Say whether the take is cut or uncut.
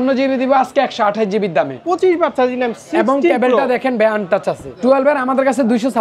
cut